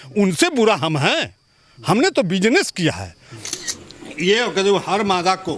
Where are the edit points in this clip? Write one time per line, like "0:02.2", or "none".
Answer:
0:03.5